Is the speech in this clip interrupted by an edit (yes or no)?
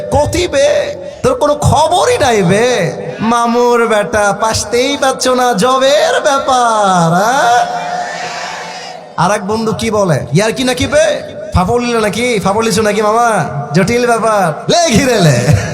yes